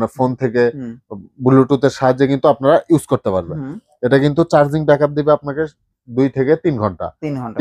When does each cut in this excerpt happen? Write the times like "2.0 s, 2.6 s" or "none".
none